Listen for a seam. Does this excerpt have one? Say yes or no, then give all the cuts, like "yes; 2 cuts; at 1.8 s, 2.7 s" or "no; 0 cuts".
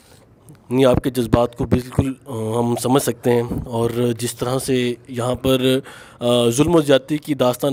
no; 0 cuts